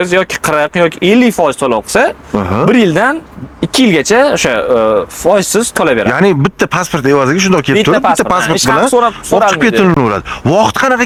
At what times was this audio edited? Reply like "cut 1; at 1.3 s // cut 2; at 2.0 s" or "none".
none